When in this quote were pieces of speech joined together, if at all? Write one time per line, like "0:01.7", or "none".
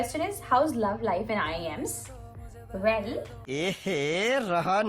0:03.4